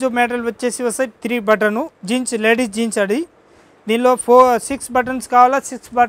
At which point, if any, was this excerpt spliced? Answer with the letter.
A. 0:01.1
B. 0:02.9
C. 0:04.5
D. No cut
A